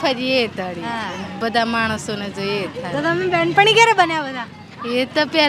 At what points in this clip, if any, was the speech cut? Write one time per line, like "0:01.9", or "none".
none